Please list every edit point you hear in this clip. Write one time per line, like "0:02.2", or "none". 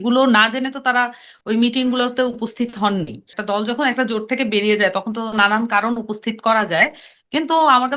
0:03.4